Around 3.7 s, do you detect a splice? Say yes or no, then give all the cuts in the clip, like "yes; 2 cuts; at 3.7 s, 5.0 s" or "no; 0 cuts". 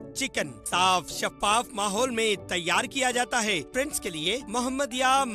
yes; 1 cut; at 3.7 s